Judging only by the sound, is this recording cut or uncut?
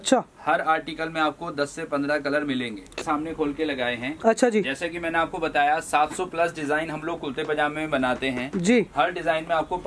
cut